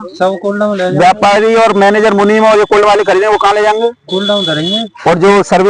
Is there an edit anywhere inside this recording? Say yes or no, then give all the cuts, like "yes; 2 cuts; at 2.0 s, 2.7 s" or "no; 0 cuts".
no; 0 cuts